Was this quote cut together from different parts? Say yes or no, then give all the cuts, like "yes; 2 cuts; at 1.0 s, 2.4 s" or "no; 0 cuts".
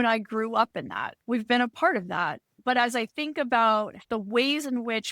yes; 3 cuts; at 1.1 s, 2.5 s, 4.0 s